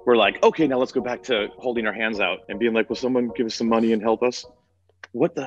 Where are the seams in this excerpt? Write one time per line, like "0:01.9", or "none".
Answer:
0:01.5
0:02.5